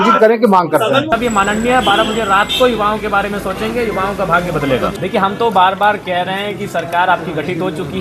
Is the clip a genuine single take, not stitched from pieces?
no; 2 cuts; at 1.1 s, 5.0 s

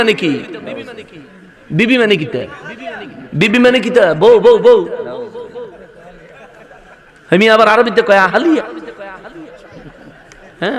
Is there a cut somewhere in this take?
no; 0 cuts

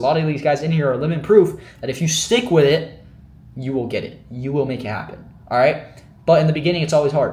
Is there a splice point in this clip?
no; 0 cuts

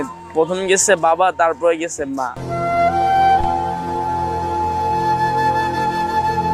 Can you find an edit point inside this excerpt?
no; 0 cuts

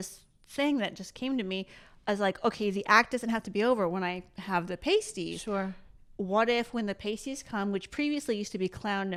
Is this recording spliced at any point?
no; 0 cuts

